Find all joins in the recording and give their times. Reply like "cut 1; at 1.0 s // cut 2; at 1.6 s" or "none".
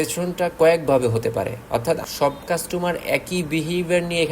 cut 1; at 2.0 s